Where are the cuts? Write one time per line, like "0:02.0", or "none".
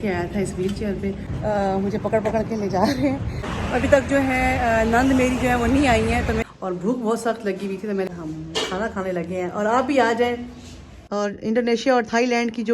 0:01.3
0:03.5
0:06.4
0:08.1
0:11.0